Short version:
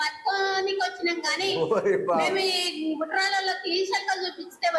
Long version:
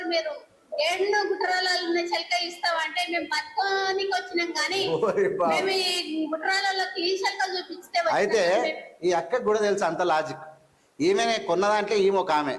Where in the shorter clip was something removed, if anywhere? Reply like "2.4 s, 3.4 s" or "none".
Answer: none